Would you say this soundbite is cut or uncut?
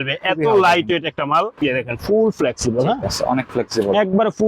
cut